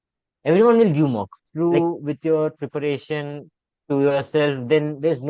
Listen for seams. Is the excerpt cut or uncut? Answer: cut